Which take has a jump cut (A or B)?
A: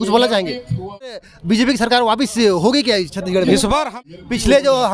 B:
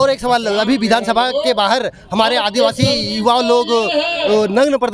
A